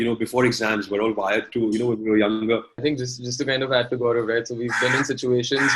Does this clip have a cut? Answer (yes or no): yes